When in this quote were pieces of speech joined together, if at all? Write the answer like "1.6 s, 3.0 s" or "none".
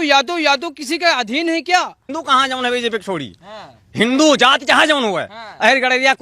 2.1 s